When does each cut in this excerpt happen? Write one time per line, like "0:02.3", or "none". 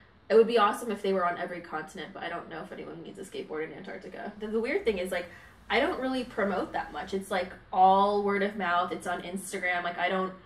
0:04.4

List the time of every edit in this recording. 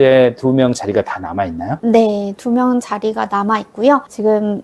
none

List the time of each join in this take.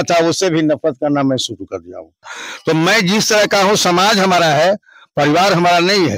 0:02.4

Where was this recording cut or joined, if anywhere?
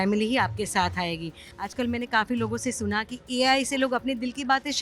0:01.4

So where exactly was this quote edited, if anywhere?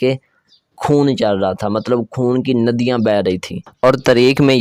none

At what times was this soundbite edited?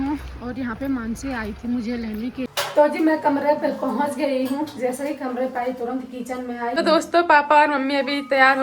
0:02.5
0:06.9

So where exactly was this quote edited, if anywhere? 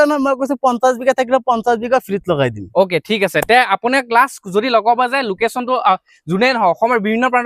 none

